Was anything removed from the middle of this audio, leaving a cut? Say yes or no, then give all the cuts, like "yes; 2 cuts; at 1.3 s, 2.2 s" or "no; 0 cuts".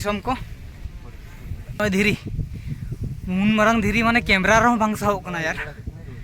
yes; 1 cut; at 1.8 s